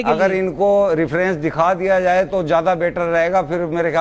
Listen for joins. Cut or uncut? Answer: uncut